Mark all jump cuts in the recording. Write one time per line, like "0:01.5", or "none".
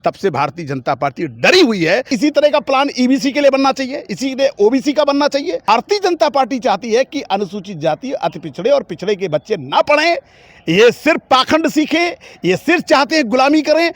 0:02.1
0:05.7